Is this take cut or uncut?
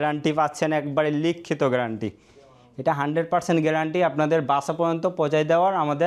uncut